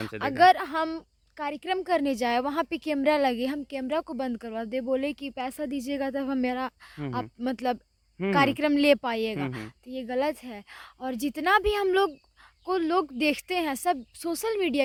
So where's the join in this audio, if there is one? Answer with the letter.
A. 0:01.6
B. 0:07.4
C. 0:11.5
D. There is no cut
D